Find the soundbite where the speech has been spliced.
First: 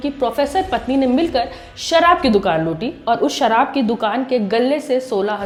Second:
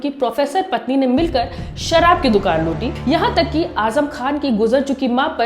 second; 1 cut; at 2.9 s

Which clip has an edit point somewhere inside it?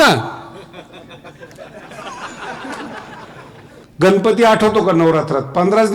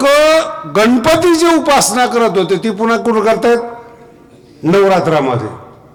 first; 1 cut; at 3.8 s

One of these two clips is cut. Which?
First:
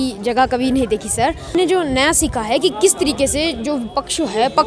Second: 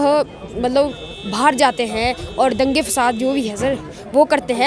first; 1 cut; at 1.5 s

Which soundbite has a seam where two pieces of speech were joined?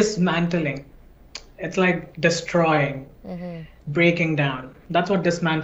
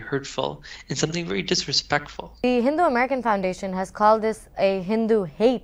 second; 1 cut; at 2.2 s

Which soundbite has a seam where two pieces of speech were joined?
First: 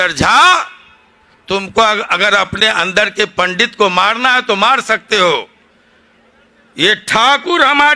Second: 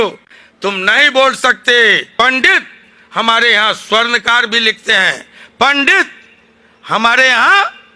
second; 1 cut; at 2.0 s

